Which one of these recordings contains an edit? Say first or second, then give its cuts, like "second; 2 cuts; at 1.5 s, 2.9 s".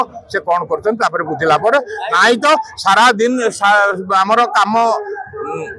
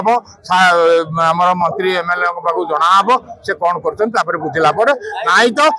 second; 1 cut; at 1.6 s